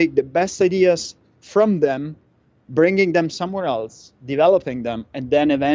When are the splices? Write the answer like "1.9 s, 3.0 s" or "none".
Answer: none